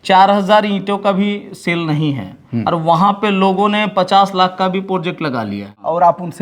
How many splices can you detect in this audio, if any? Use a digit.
1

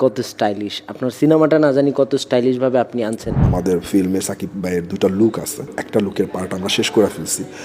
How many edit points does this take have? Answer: 2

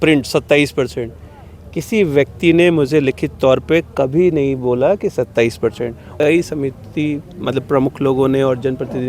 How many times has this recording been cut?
1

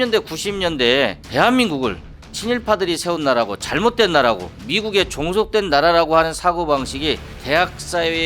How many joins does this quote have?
2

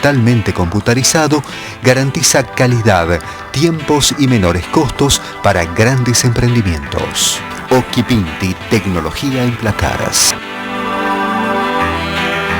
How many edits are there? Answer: 1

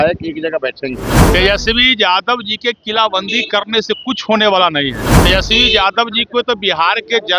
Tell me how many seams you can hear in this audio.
2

